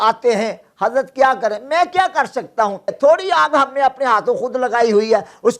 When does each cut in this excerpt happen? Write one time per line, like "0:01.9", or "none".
0:02.9

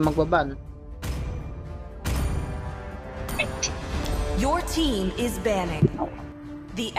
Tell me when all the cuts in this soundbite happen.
0:06.0

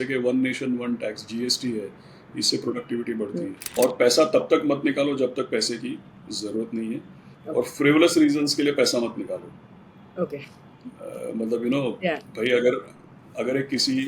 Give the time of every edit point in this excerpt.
0:03.6

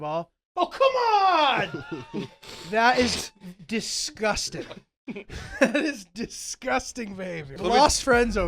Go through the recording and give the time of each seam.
0:07.6

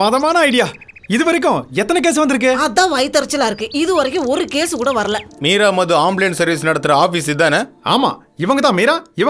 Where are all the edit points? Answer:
0:05.3

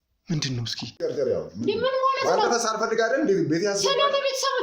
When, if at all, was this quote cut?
0:01.0

